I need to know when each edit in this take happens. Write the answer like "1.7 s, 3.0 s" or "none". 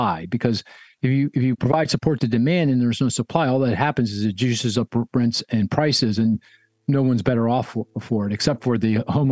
none